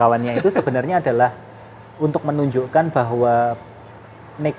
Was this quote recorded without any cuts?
yes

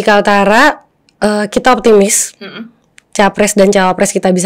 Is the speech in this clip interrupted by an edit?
no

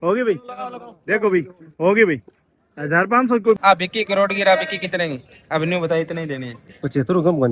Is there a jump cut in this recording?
yes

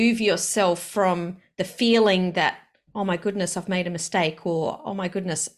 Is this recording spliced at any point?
no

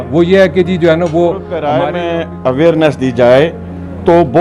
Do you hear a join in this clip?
yes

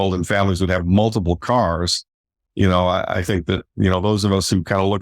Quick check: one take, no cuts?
no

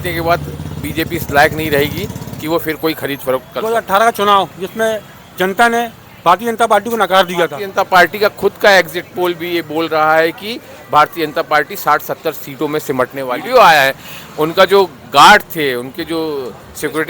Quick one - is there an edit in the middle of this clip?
yes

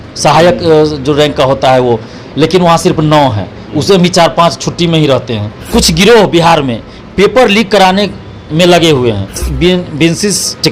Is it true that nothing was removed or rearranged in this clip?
no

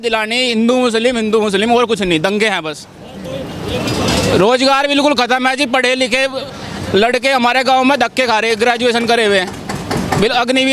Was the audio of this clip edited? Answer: no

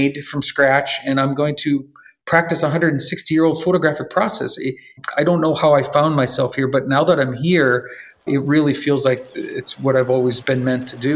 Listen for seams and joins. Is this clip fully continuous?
yes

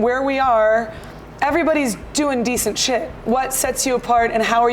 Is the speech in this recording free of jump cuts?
no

